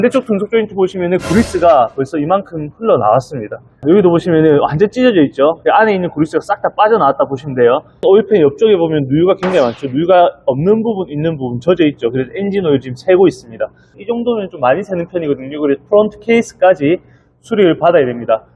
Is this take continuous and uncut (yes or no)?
no